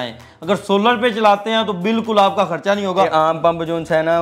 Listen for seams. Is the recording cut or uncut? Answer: cut